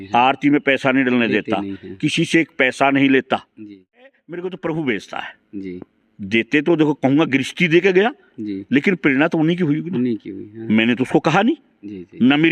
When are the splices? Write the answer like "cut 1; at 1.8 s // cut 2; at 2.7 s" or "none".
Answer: cut 1; at 4.0 s